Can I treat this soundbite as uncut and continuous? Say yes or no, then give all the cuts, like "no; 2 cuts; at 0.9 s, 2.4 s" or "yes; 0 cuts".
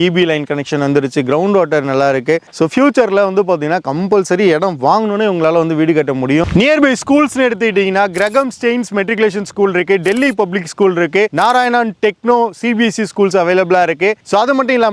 yes; 0 cuts